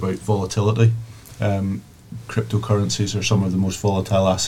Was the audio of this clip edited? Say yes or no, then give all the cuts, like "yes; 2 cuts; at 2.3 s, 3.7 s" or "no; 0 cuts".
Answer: no; 0 cuts